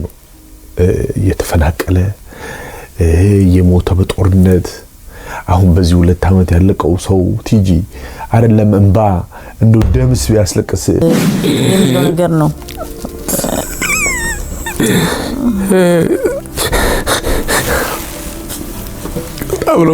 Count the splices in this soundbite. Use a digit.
1